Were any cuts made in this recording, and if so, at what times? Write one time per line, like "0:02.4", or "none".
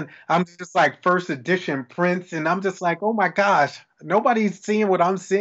none